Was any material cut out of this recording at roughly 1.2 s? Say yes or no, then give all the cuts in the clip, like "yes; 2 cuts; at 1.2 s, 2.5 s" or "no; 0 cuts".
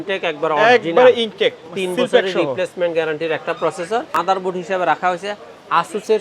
no; 1 cut; at 4.1 s